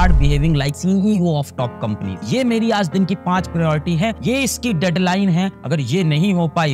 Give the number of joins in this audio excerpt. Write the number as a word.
zero